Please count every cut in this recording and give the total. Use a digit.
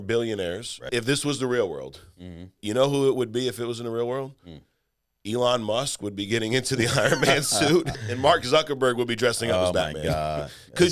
3